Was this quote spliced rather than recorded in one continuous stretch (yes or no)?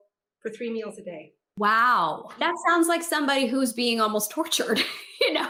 no